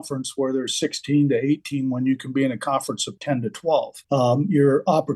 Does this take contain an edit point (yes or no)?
yes